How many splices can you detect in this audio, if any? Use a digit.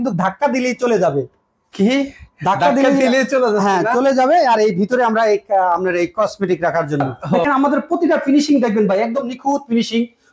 1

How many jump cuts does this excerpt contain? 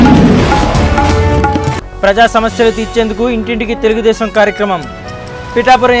1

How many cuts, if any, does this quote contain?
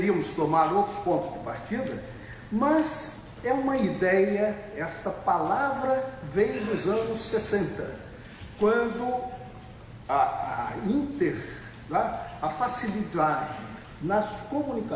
1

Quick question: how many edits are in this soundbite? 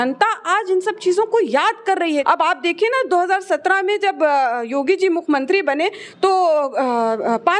1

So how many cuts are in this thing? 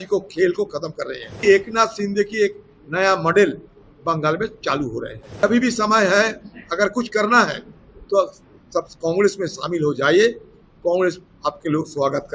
2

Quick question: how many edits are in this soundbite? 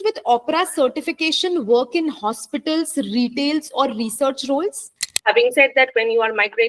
1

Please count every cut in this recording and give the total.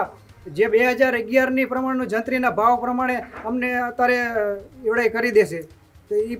0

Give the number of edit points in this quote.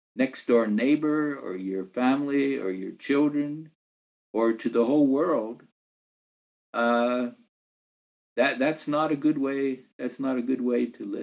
0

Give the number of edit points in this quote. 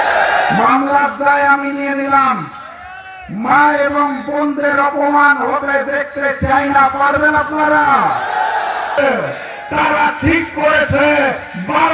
1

